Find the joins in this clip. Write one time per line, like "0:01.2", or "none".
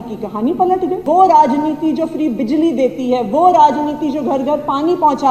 0:01.0